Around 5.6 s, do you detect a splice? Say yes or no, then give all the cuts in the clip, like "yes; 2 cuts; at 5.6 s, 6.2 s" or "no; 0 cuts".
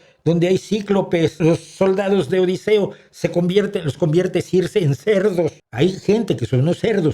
yes; 2 cuts; at 1.4 s, 5.6 s